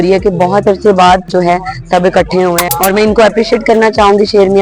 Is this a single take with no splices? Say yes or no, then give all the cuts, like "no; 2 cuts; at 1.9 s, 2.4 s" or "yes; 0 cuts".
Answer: no; 2 cuts; at 1.3 s, 2.6 s